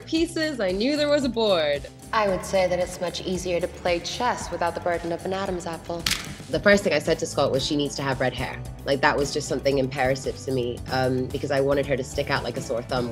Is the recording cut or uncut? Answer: cut